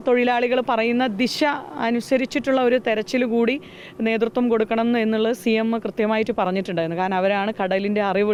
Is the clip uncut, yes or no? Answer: yes